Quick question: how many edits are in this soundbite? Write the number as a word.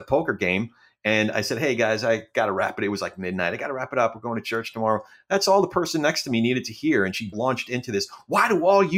one